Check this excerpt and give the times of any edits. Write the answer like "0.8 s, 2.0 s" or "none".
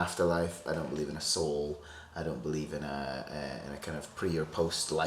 none